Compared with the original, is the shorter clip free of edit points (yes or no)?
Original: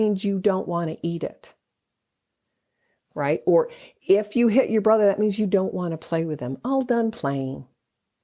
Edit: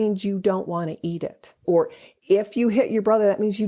no